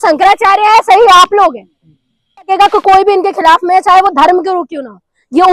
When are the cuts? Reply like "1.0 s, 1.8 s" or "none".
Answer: 2.5 s